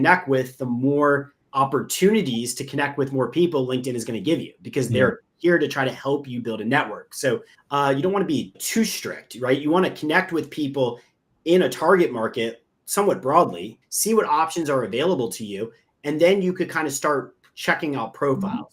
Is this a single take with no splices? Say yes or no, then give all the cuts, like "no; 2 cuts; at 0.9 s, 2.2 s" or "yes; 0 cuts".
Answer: no; 3 cuts; at 1.4 s, 7.6 s, 13.8 s